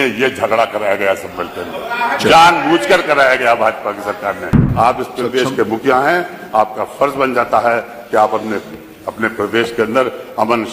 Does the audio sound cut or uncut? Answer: cut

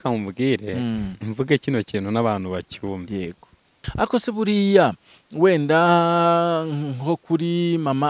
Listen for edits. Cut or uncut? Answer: cut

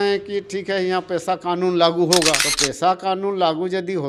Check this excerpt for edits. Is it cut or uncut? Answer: uncut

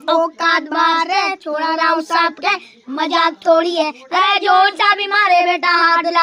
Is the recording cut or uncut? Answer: uncut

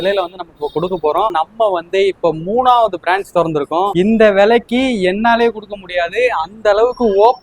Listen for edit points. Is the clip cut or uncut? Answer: cut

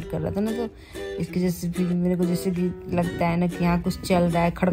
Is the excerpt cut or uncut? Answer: uncut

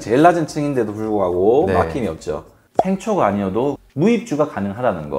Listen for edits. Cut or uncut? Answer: cut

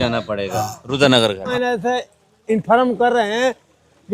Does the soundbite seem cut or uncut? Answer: cut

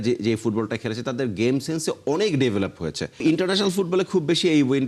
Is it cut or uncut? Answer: cut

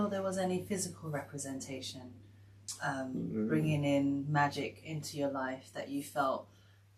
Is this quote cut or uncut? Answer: uncut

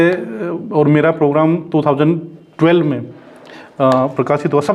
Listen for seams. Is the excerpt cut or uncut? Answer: uncut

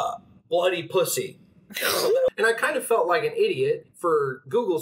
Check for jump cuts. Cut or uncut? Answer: cut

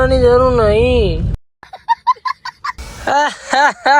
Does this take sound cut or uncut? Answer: cut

